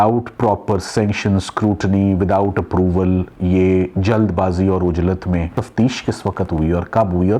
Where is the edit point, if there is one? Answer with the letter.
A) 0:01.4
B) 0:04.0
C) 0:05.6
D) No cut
C